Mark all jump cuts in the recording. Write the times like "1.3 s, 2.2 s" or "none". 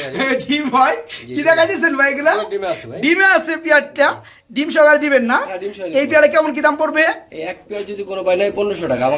none